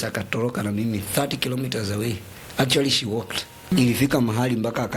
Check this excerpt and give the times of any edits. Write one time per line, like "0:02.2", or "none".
0:03.7